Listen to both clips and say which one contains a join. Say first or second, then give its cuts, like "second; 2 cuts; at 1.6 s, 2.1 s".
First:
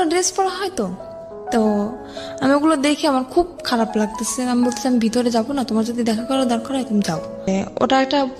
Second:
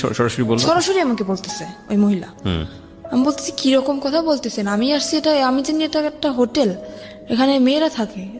first; 1 cut; at 7.5 s